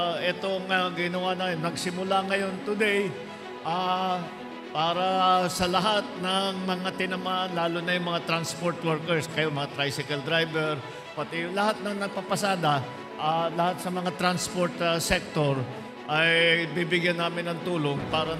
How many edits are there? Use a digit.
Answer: 0